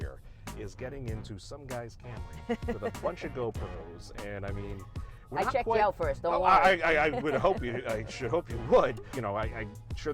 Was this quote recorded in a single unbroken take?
no; 1 cut; at 9.1 s

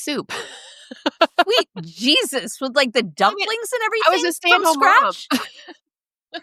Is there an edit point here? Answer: no; 0 cuts

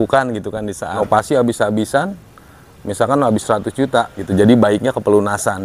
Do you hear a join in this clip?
yes; 2 cuts; at 1.0 s, 4.2 s

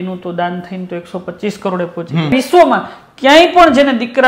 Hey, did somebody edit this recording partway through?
yes; 1 cut; at 2.3 s

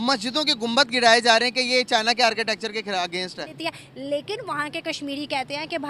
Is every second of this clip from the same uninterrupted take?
no; 1 cut; at 3.5 s

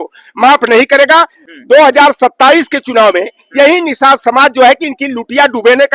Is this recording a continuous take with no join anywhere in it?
no; 1 cut; at 1.4 s

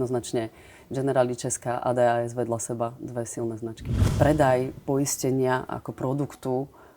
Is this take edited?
yes; 1 cut; at 4.0 s

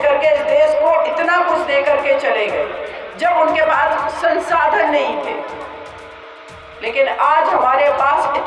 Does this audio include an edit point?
no; 0 cuts

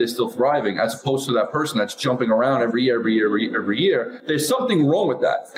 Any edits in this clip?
yes; 1 cut; at 4.2 s

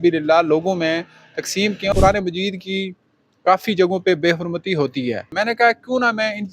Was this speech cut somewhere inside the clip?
yes; 2 cuts; at 1.9 s, 5.3 s

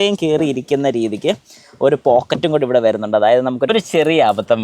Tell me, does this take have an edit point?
yes; 1 cut; at 3.7 s

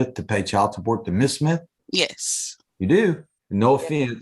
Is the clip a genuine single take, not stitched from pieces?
no; 2 cuts; at 1.8 s, 3.3 s

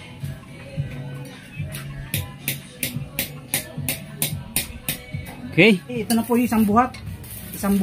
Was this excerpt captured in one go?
no; 1 cut; at 6.0 s

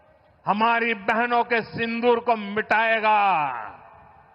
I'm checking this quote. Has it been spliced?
no; 0 cuts

